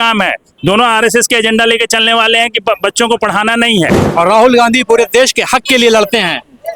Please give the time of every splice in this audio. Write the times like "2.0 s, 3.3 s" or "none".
4.0 s